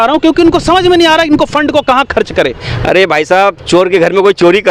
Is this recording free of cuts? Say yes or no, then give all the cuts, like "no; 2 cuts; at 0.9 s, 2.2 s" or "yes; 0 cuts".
no; 1 cut; at 2.7 s